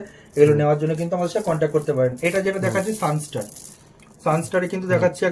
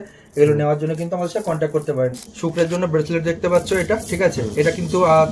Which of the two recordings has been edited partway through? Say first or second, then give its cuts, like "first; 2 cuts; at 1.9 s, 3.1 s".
second; 1 cut; at 2.2 s